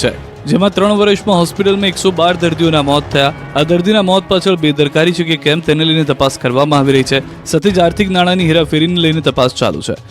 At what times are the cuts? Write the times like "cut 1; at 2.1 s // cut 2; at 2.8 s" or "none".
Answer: cut 1; at 2.0 s